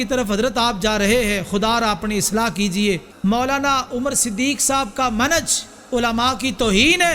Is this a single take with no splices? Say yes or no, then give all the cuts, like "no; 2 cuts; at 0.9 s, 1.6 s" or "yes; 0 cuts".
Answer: no; 1 cut; at 3.1 s